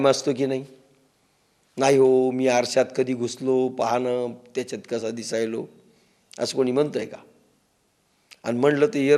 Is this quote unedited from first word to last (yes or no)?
yes